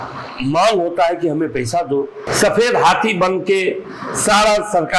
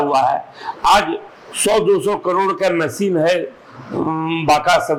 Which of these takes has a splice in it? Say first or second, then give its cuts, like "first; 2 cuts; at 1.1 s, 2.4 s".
first; 1 cut; at 2.2 s